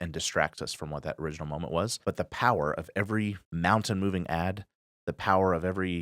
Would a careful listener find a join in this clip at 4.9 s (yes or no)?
no